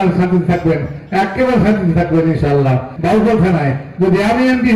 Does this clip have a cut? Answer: yes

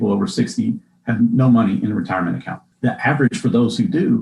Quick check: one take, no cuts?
yes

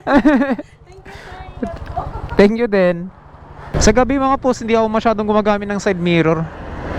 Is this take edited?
yes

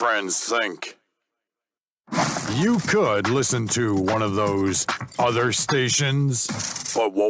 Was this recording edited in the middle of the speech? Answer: no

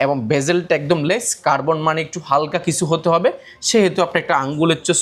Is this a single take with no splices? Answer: yes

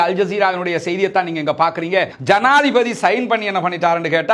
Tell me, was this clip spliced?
yes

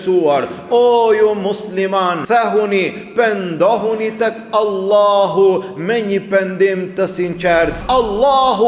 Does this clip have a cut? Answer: yes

